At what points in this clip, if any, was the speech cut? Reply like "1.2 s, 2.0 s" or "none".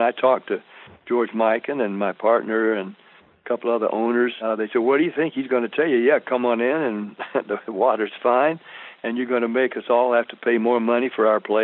4.4 s

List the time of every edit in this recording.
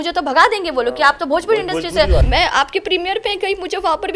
2.2 s

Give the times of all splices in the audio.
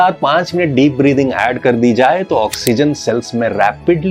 none

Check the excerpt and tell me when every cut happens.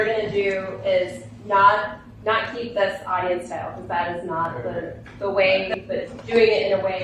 5.7 s

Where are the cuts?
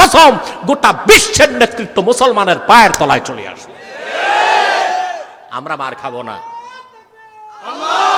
none

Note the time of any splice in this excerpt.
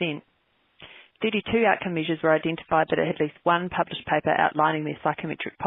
none

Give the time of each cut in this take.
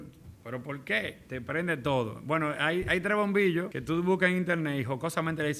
3.8 s

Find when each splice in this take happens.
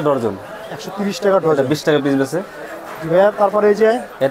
none

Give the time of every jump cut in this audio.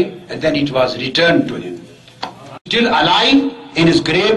2.6 s

